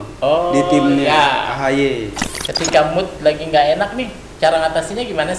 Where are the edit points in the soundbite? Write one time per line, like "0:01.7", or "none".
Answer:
0:02.2